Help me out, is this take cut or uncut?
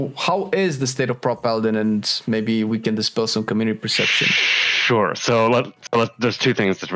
uncut